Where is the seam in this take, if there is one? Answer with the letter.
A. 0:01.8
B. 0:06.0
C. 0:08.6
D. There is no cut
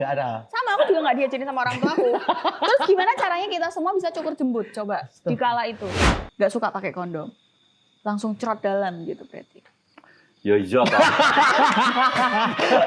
B